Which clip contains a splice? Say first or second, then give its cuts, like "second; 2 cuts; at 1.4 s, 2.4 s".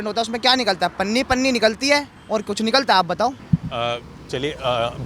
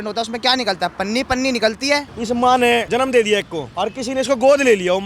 second; 3 cuts; at 2.1 s, 2.9 s, 3.6 s